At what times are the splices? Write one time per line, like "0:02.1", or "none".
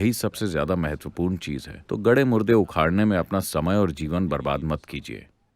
0:01.7